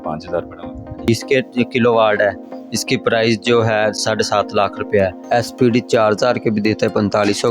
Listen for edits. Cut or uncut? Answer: cut